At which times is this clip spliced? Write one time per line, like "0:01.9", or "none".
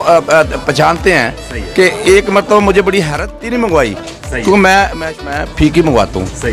0:03.2
0:05.3